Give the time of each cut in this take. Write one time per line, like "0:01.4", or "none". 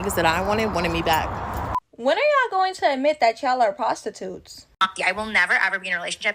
0:01.9
0:04.9